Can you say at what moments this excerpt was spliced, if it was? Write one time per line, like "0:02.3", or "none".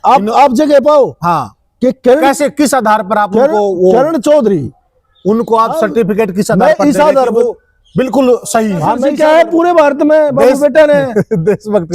0:09.1